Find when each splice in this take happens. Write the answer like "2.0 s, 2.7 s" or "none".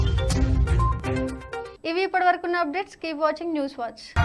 none